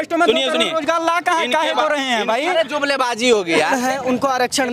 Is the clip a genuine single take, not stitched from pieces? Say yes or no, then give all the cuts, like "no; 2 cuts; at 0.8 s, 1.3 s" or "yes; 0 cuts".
no; 1 cut; at 3.7 s